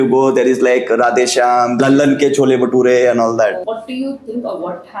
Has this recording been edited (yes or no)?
yes